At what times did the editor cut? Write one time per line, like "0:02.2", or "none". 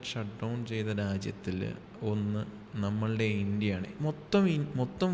none